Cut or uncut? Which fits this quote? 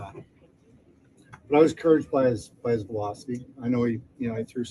uncut